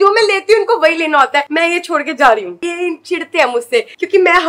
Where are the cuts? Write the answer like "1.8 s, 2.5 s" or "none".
2.6 s